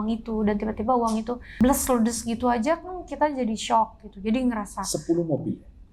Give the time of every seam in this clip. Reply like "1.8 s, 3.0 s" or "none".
1.5 s